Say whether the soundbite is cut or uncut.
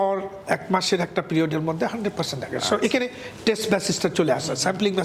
uncut